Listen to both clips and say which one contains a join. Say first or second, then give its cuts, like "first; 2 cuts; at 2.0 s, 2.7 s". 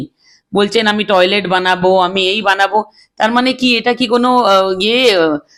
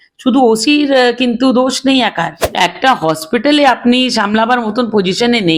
second; 1 cut; at 2.4 s